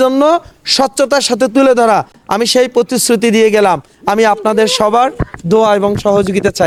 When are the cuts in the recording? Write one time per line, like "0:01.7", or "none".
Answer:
none